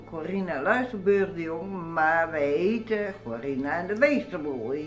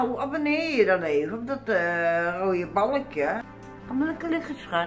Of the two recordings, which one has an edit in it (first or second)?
second